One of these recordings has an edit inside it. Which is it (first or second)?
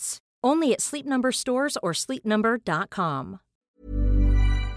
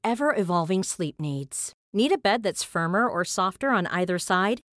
first